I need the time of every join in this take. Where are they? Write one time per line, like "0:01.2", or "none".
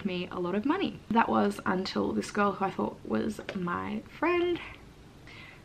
0:01.0